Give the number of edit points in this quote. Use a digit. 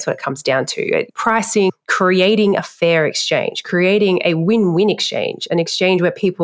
1